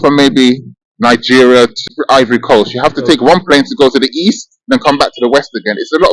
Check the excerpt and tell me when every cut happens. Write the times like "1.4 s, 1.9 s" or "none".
1.8 s